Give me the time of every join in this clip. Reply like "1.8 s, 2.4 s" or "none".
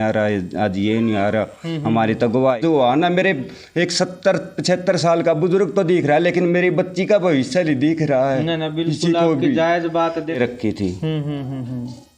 2.6 s, 10.4 s